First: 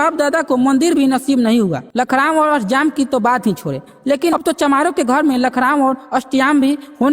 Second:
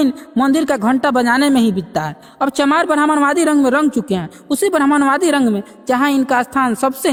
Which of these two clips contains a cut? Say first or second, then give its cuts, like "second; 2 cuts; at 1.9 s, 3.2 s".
first; 1 cut; at 1.8 s